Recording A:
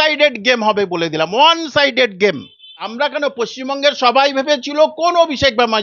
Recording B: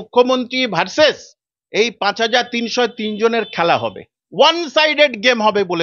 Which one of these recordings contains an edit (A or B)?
A